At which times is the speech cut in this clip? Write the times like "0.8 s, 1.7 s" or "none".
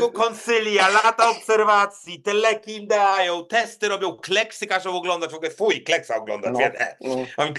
none